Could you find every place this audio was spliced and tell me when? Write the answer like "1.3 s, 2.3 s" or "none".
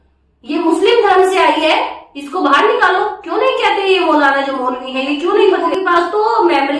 5.4 s